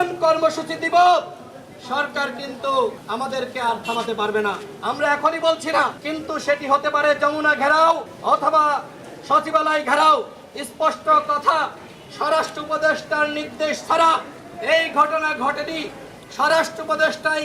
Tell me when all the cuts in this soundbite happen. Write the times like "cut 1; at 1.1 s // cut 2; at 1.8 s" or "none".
cut 1; at 3.0 s // cut 2; at 6.1 s // cut 3; at 8.1 s